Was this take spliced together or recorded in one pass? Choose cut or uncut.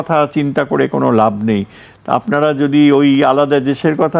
uncut